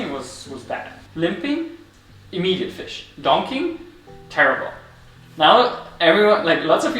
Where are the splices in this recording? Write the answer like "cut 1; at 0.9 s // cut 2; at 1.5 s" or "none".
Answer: cut 1; at 1.0 s

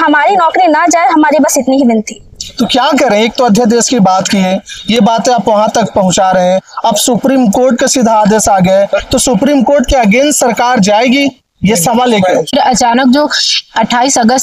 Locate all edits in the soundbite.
cut 1; at 12.5 s

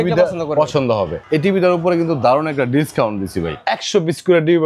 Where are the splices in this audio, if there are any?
cut 1; at 1.2 s // cut 2; at 3.5 s

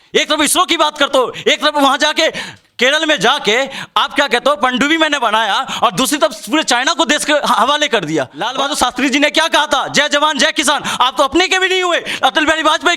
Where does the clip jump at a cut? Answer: cut 1; at 8.4 s

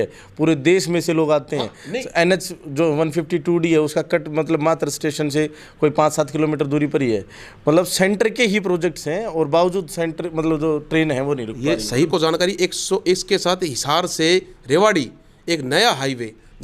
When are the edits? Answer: cut 1; at 12.1 s

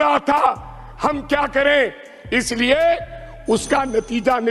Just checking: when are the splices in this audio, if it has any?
none

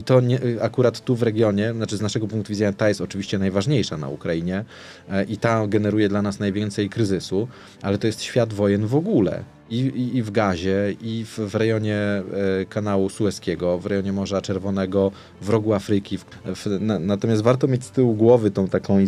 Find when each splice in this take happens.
cut 1; at 16.2 s

